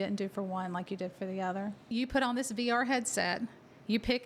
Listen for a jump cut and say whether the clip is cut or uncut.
cut